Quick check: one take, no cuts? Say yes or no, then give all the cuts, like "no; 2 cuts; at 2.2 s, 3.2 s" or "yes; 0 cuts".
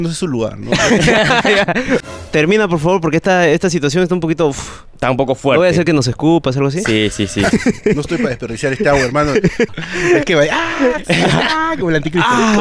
no; 3 cuts; at 2.1 s, 7.8 s, 9.8 s